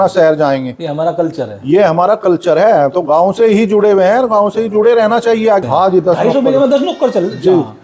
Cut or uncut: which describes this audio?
cut